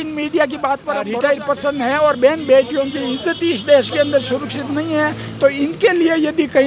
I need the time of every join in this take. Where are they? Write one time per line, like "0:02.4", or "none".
0:01.0